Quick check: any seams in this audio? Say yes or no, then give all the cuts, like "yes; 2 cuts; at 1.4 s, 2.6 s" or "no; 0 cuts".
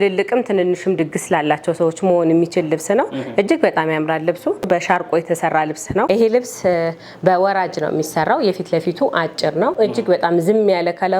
yes; 3 cuts; at 4.7 s, 6.1 s, 9.7 s